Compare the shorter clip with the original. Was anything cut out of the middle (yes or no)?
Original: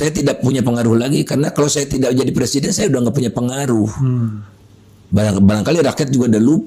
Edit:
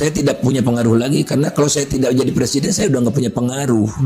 no